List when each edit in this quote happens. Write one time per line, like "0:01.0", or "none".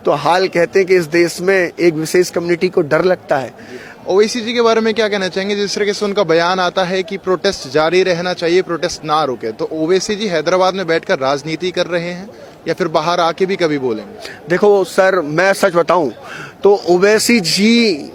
none